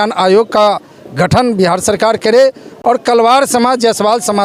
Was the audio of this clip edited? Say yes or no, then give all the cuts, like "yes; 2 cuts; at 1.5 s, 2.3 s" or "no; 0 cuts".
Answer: no; 0 cuts